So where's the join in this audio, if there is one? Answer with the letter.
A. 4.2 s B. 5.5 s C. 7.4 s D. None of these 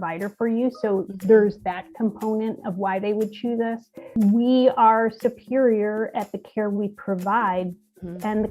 A